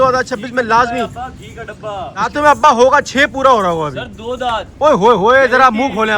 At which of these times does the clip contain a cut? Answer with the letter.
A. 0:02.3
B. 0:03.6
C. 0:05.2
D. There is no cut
A